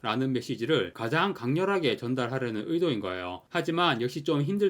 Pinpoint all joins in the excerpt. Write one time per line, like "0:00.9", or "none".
none

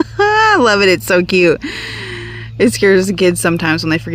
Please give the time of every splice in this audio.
none

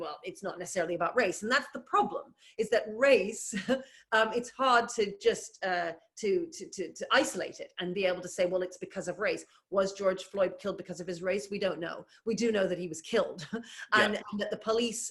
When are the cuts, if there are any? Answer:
none

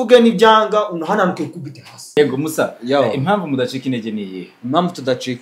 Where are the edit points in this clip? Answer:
0:02.2

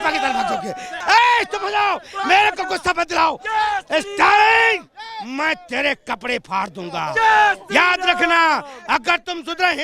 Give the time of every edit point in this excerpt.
0:00.9

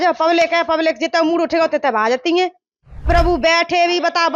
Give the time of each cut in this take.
0:03.0

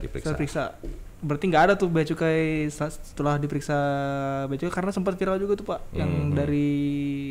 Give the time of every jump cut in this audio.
none

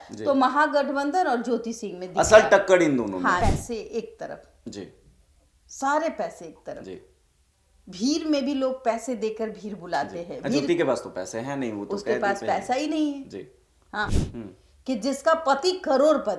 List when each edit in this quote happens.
0:03.4
0:14.2

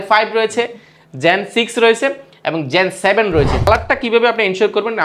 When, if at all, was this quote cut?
0:03.7

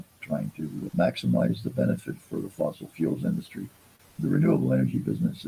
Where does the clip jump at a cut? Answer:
none

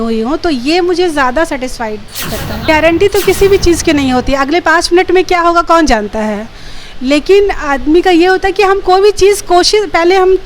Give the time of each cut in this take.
0:02.7

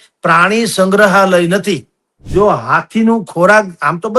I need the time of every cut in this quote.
0:02.2

